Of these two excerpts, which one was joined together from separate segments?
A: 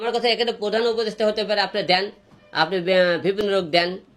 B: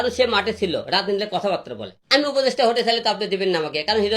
B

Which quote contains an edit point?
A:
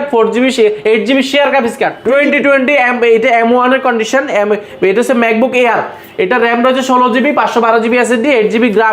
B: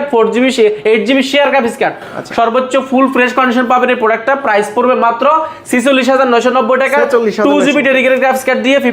A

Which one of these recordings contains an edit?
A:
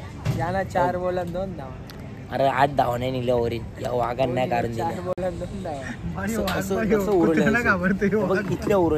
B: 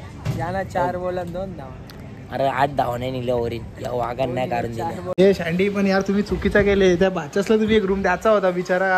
B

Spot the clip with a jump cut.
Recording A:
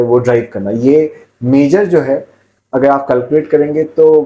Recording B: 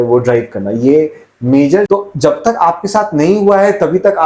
B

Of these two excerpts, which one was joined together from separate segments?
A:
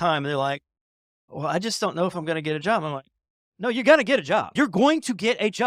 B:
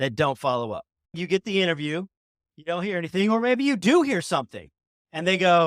B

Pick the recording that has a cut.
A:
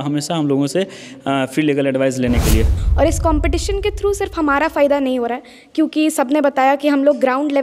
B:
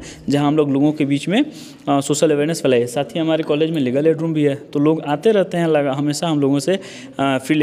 A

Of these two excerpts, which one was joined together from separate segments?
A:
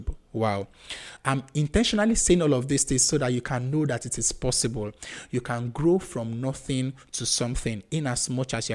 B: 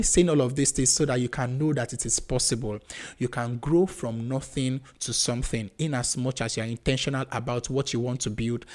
A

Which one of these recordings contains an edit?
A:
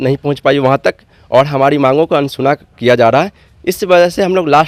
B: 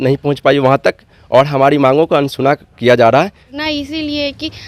B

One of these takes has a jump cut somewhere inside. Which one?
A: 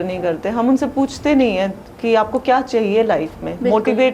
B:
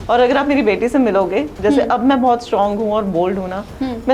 B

